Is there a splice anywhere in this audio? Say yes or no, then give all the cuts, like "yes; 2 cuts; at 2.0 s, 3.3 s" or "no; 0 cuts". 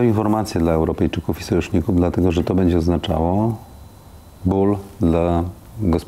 no; 0 cuts